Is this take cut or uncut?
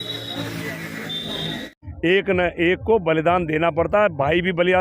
cut